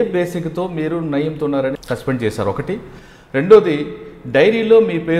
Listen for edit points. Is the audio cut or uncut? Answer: uncut